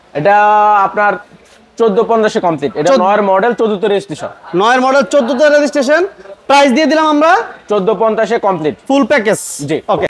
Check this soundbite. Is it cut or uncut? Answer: uncut